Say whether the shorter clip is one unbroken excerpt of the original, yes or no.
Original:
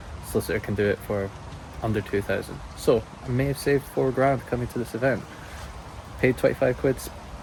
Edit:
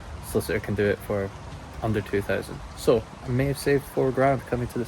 yes